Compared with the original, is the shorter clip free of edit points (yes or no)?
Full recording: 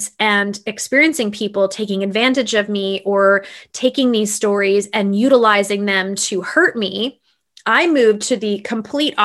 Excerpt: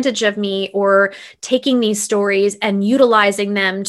yes